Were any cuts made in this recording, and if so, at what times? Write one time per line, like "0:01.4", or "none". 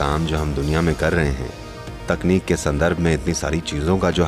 none